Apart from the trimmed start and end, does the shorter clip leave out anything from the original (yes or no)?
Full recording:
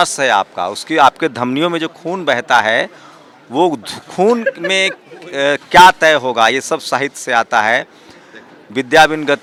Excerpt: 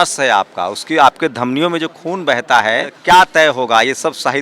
yes